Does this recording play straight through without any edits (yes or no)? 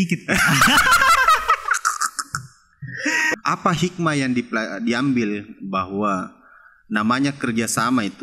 no